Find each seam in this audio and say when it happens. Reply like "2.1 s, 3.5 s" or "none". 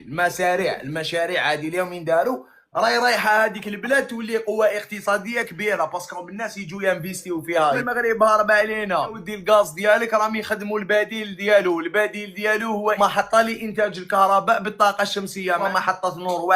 7.8 s, 13.0 s, 15.6 s